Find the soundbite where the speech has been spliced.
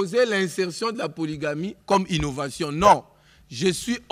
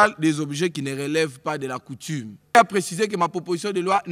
second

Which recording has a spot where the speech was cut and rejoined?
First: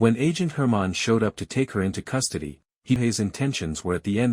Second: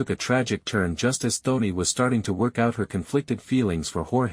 first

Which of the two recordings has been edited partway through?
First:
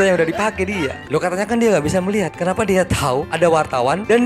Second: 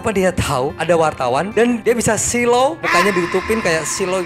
first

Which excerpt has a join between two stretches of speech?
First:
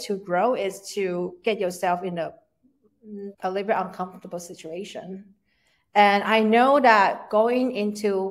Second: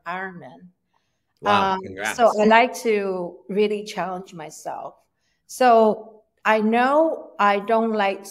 first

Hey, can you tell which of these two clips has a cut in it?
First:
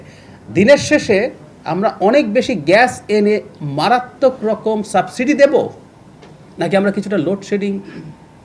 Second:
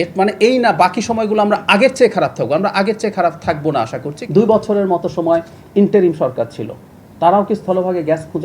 second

